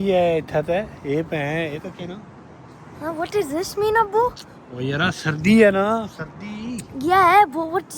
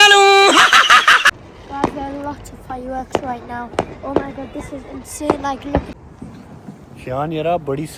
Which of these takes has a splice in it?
second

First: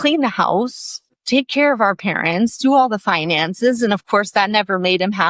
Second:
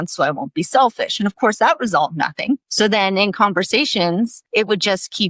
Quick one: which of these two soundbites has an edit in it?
second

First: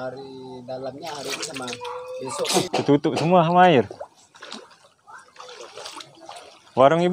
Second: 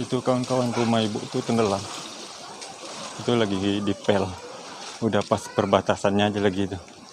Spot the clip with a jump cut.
first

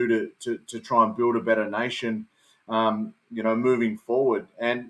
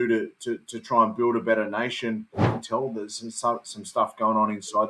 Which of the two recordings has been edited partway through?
second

